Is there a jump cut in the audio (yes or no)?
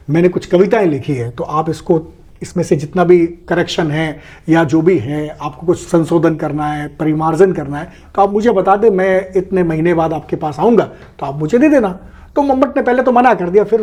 no